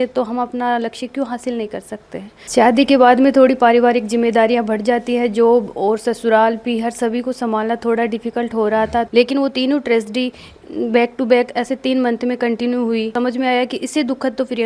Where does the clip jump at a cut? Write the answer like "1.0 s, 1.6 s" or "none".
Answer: 2.4 s, 9.1 s, 13.1 s